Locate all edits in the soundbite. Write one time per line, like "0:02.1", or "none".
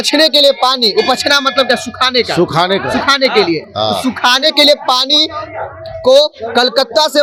none